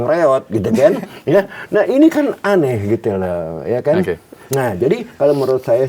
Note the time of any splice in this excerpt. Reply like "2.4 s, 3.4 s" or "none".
none